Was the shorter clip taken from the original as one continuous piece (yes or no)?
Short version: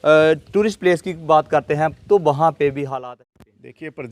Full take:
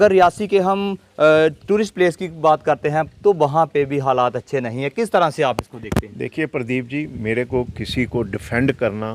no